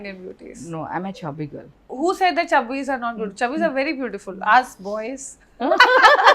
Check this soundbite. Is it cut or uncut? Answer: cut